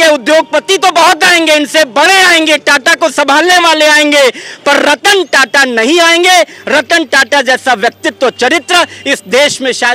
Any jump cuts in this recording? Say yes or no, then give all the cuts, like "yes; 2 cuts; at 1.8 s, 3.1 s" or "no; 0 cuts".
no; 0 cuts